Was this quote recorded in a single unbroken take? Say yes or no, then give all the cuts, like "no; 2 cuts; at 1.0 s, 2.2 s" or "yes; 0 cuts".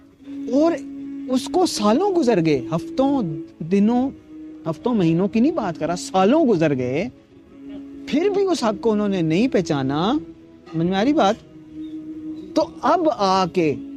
yes; 0 cuts